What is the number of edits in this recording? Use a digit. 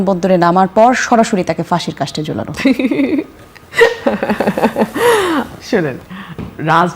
0